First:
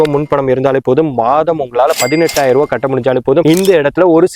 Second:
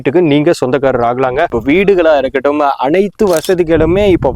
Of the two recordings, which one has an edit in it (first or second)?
second